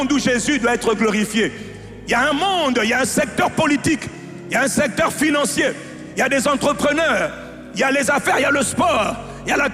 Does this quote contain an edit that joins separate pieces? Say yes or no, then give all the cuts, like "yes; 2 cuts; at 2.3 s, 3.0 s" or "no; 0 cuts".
no; 0 cuts